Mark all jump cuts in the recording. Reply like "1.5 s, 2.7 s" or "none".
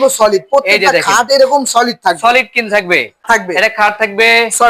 3.2 s